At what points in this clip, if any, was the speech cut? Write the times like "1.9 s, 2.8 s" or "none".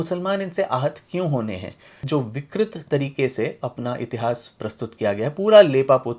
1.9 s

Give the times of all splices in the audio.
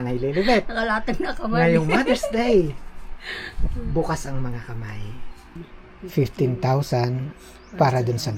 5.6 s

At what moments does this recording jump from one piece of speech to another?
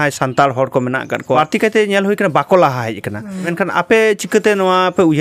1.4 s, 3.5 s

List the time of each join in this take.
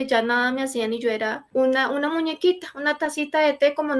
none

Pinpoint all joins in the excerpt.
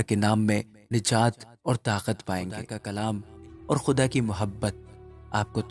2.8 s

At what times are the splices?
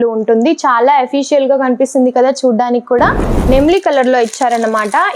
3.3 s

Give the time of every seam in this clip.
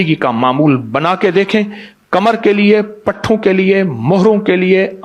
none

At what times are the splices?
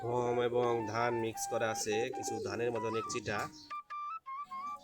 none

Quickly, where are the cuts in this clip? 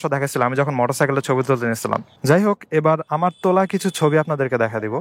2.1 s

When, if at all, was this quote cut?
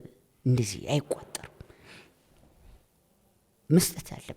none

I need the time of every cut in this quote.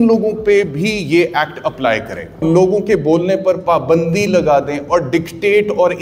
2.4 s

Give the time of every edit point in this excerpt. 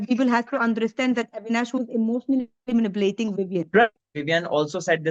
4.0 s

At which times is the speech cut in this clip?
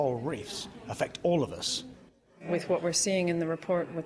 2.4 s

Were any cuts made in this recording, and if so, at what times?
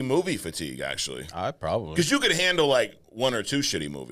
none

